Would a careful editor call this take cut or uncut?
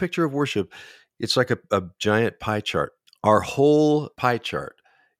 cut